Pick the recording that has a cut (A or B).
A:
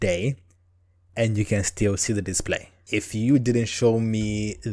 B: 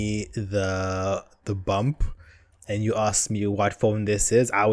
A